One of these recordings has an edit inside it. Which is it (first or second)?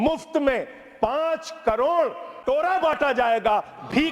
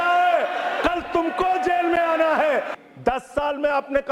second